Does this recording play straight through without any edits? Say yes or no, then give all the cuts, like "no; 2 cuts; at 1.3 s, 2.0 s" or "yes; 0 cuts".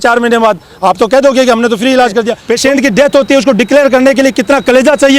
no; 1 cut; at 2.4 s